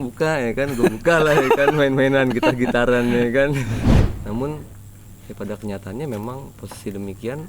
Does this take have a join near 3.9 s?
yes; 1 cut; at 3.9 s

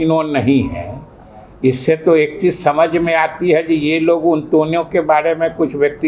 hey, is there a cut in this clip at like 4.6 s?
no; 0 cuts

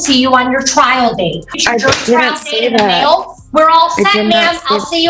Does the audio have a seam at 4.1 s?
no; 1 cut; at 1.5 s

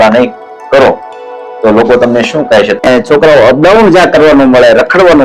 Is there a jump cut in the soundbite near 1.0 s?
no; 1 cut; at 2.8 s

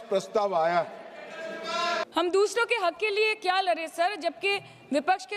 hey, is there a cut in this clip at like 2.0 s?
yes; 1 cut; at 2.0 s

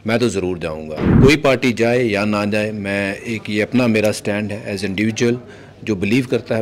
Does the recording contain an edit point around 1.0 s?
yes; 1 cut; at 1.0 s

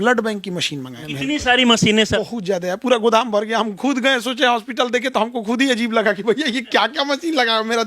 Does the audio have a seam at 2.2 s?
yes; 2 cuts; at 1.0 s, 2.2 s

